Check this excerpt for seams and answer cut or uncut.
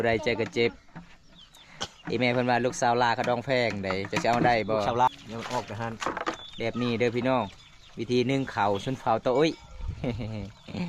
cut